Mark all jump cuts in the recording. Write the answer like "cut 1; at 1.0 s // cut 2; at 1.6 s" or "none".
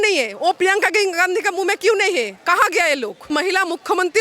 cut 1; at 3.3 s